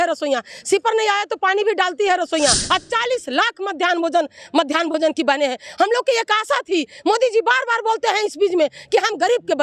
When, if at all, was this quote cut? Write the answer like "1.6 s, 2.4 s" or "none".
2.6 s